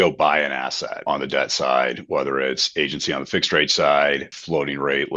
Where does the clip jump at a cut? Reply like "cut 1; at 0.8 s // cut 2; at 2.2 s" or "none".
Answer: cut 1; at 1.0 s // cut 2; at 4.3 s

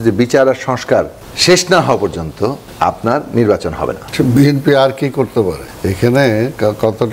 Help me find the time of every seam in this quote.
cut 1; at 1.2 s // cut 2; at 2.6 s // cut 3; at 4.0 s // cut 4; at 5.7 s

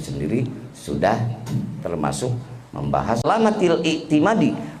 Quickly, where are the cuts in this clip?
cut 1; at 3.2 s

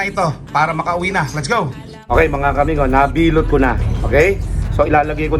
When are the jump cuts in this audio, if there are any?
cut 1; at 2.1 s

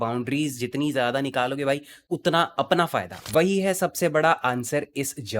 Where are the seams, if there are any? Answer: cut 1; at 3.2 s

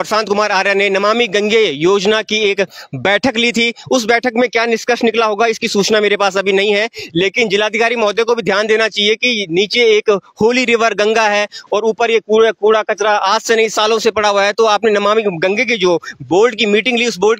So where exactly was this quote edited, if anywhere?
none

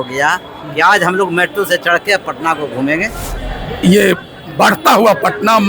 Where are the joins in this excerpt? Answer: cut 1; at 3.3 s

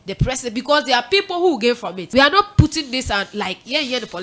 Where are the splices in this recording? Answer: cut 1; at 1.9 s

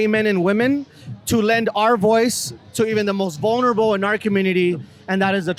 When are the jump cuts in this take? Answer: none

